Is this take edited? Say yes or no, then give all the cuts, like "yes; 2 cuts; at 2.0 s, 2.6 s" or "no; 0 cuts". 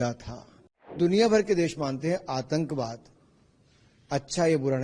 yes; 1 cut; at 1.0 s